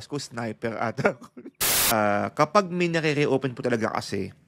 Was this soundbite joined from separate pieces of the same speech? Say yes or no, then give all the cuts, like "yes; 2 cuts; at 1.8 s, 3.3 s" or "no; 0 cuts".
yes; 1 cut; at 1.3 s